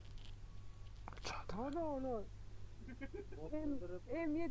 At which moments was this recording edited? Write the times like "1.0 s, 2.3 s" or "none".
none